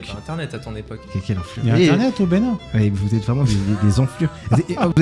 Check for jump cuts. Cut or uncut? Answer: uncut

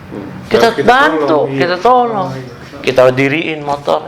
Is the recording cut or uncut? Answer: uncut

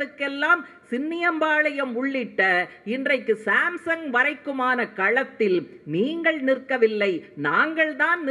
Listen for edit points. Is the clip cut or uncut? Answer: uncut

